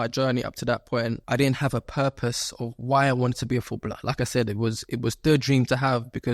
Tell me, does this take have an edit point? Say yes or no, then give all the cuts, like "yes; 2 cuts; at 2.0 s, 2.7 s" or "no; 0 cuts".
yes; 1 cut; at 1.2 s